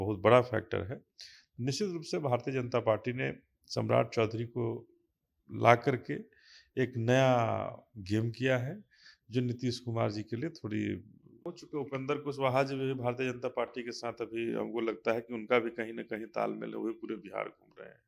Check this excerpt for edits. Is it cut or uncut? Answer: cut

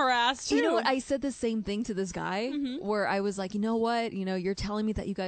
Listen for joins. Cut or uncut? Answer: uncut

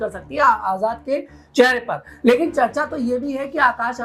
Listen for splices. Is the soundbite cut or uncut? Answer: uncut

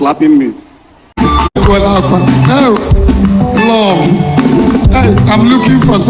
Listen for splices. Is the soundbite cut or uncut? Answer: cut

